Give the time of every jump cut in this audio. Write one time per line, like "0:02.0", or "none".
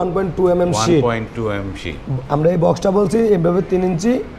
none